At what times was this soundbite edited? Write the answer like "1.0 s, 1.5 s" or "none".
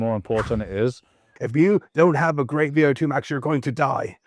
1.3 s

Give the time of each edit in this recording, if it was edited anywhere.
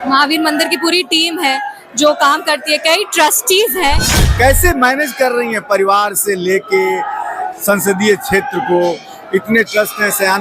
4.2 s

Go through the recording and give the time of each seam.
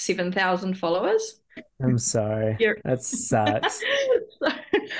1.7 s

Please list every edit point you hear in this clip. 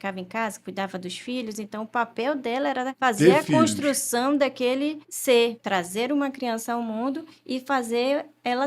2.9 s, 5.1 s, 5.6 s

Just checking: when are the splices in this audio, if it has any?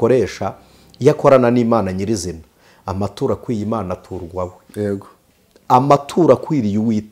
none

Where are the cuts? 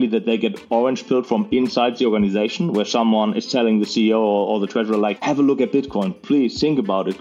5.2 s

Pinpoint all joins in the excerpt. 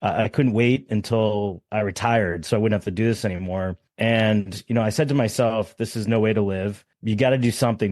3.8 s, 6.9 s

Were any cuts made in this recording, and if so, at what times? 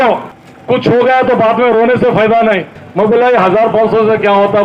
2.8 s

